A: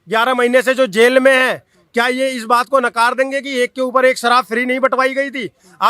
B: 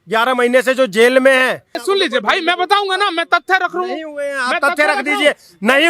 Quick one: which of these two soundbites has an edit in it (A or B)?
B